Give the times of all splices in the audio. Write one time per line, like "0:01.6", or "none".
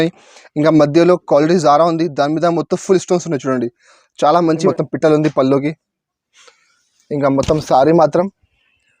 0:04.7